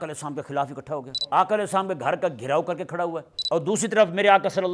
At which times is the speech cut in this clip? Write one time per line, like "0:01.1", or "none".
0:01.1
0:03.3